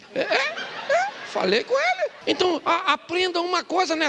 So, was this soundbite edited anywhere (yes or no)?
yes